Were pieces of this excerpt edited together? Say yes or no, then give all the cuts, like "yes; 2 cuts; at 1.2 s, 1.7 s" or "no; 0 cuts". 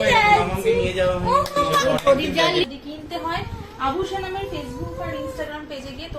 yes; 1 cut; at 2.7 s